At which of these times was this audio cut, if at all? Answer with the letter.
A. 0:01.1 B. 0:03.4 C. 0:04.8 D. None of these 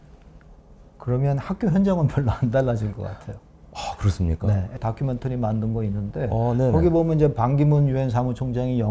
C